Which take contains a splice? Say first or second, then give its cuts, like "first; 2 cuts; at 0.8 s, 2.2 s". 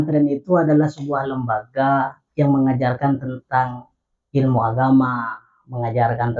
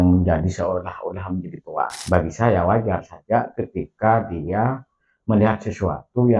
second; 1 cut; at 2.0 s